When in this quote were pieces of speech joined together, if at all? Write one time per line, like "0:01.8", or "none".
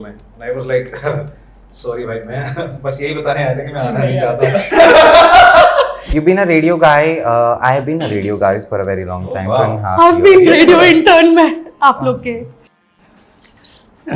0:06.0